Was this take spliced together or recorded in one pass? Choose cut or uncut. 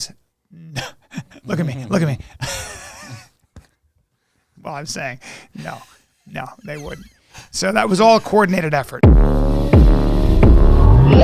cut